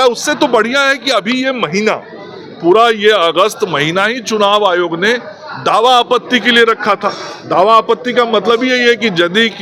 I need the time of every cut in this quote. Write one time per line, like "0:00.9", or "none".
none